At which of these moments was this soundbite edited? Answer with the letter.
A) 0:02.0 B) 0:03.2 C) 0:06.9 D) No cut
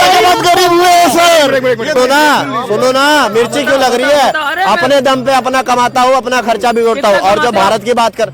A